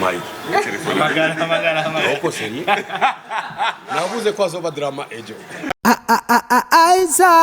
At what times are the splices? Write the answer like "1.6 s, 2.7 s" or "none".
5.7 s